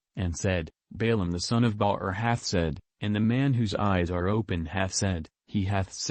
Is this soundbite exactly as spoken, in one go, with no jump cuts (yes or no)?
yes